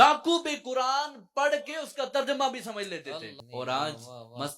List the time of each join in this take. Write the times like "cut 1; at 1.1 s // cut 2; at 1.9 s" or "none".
cut 1; at 3.3 s